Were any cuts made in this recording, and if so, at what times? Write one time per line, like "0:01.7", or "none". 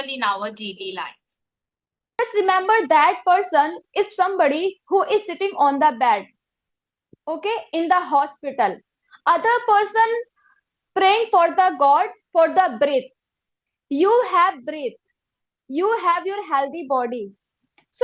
0:02.2